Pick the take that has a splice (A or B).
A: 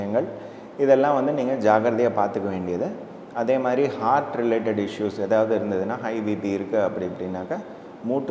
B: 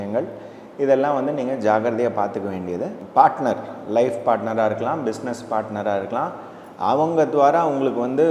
B